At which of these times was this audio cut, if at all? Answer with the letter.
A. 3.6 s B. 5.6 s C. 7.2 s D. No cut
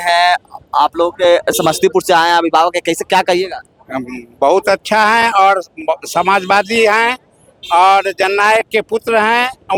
D